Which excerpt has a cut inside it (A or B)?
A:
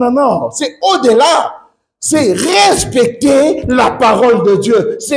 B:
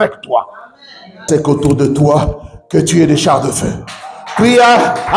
B